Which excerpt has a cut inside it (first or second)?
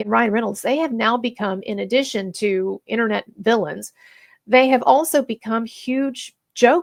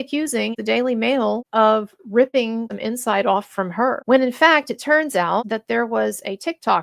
second